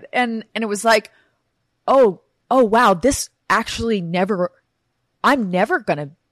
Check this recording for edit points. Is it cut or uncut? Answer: uncut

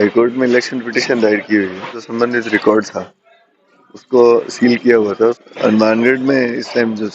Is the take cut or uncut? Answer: cut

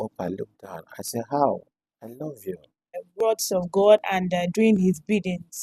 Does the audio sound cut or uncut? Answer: cut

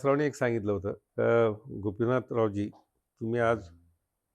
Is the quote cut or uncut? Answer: cut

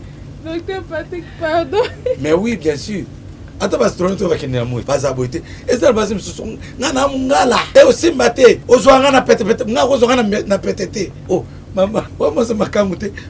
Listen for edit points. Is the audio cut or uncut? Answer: cut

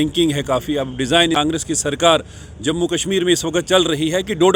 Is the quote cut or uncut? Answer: cut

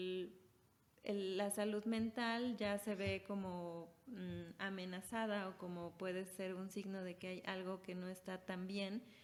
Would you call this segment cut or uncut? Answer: uncut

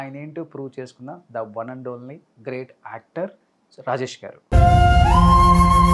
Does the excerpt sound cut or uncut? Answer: uncut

